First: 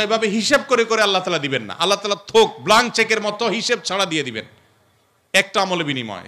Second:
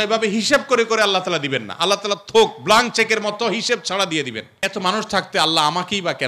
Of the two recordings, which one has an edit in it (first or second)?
second